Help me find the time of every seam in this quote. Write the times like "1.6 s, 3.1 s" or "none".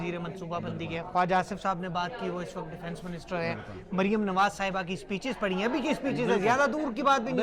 none